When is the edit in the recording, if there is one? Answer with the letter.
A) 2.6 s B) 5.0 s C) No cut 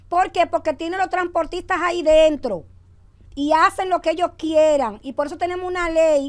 C